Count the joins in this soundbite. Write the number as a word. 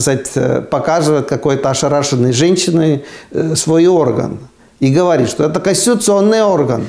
zero